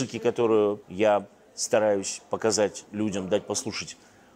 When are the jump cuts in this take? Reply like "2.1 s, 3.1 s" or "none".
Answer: 0.9 s, 2.8 s